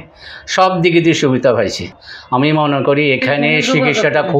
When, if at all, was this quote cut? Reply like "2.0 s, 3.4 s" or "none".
1.9 s